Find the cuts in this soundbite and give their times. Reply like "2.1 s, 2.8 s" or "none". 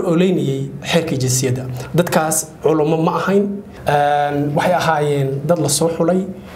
3.7 s